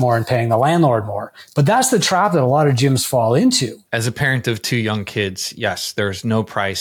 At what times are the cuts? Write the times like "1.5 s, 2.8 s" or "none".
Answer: 3.7 s